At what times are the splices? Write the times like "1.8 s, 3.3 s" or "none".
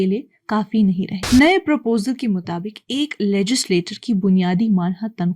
1.1 s